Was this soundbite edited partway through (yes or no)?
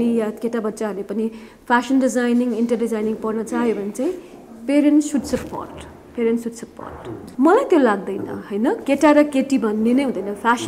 no